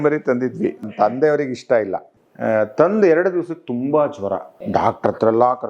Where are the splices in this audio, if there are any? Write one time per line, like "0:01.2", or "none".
0:00.8
0:02.1
0:04.7